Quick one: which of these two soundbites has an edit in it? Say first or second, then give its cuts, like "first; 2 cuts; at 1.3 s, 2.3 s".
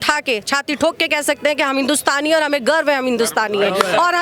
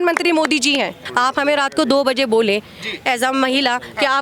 second; 1 cut; at 1.0 s